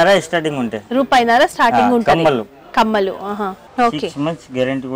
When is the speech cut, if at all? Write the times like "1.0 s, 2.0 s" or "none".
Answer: 3.6 s